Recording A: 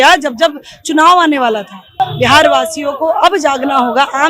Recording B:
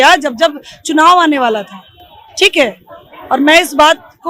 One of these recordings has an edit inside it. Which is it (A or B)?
A